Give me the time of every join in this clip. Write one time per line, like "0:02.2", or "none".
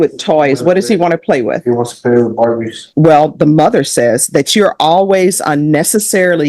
0:02.8